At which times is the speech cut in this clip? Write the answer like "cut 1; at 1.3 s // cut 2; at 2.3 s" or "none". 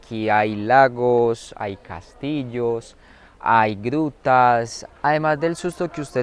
cut 1; at 4.8 s